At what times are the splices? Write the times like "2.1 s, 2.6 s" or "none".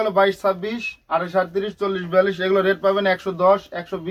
none